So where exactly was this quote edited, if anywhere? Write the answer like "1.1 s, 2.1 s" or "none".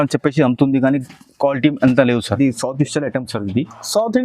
2.3 s